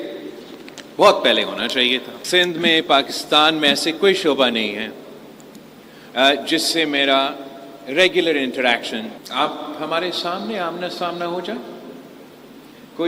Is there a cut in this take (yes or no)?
yes